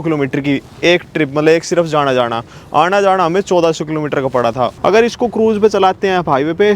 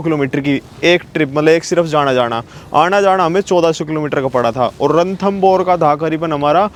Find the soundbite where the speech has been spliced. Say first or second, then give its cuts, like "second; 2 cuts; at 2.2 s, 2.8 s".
first; 1 cut; at 4.7 s